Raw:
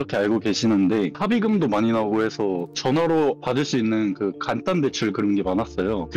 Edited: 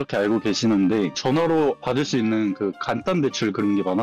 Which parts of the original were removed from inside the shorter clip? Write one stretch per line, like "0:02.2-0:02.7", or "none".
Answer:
0:01.1-0:02.7